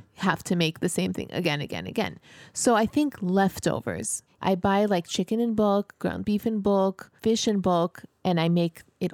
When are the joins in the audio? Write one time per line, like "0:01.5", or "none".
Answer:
0:04.4
0:07.1